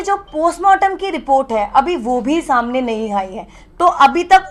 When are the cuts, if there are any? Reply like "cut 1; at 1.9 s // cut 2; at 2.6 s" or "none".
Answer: none